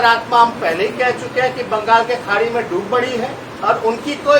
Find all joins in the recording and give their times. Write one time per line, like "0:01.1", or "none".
0:03.5